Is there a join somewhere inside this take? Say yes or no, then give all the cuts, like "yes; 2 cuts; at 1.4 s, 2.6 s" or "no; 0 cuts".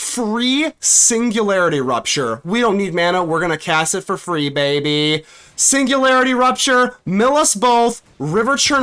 no; 0 cuts